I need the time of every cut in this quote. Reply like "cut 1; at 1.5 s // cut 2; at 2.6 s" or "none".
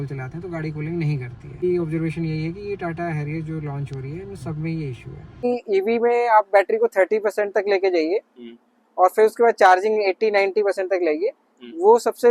cut 1; at 1.6 s // cut 2; at 5.4 s